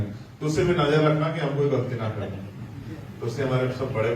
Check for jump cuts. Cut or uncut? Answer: uncut